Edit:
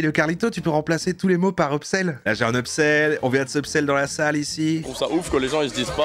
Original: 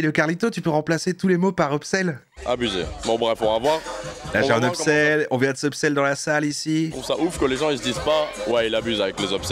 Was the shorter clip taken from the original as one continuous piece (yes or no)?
no